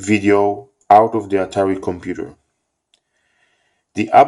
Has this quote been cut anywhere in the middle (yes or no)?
no